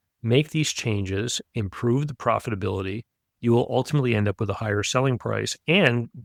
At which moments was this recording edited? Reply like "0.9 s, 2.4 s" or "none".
none